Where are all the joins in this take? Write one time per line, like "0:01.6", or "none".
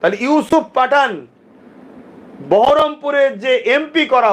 none